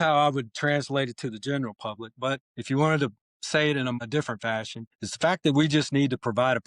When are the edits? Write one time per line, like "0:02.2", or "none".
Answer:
0:02.5
0:04.4